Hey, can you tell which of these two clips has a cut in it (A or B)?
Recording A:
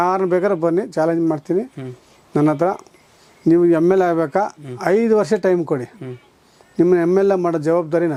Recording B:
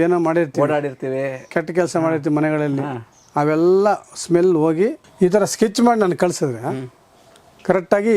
B